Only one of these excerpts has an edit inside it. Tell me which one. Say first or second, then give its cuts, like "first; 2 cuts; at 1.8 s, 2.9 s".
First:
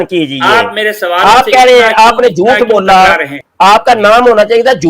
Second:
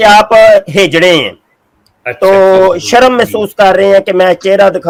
first; 1 cut; at 3.4 s